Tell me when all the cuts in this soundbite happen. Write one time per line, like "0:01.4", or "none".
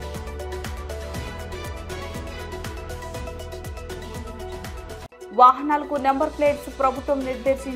0:01.8
0:04.9